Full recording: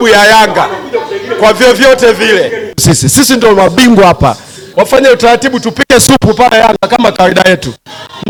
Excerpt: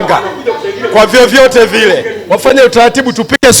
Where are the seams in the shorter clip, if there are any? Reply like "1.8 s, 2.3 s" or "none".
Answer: 2.1 s